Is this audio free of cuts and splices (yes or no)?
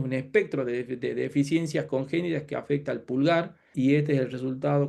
no